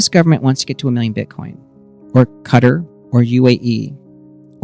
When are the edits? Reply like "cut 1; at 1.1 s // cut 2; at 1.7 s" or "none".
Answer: none